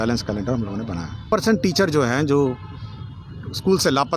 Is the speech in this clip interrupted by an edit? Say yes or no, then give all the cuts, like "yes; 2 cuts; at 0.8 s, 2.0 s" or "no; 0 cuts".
yes; 1 cut; at 1.2 s